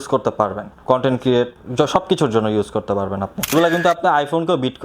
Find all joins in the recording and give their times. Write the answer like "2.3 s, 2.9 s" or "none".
3.5 s